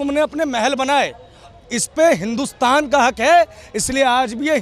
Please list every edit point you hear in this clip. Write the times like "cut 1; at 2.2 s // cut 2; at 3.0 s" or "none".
none